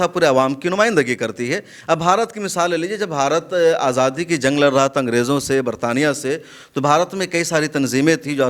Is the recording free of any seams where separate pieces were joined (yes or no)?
yes